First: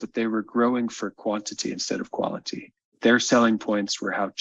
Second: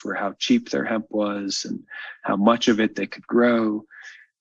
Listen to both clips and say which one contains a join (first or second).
first